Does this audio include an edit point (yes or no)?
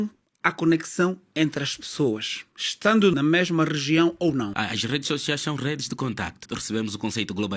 yes